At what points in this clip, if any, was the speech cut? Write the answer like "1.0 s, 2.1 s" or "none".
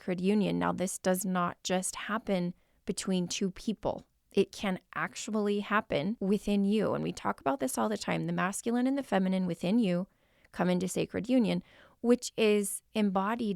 4.1 s, 6.2 s